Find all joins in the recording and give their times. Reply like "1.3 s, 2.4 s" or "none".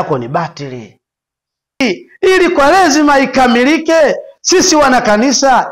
1.8 s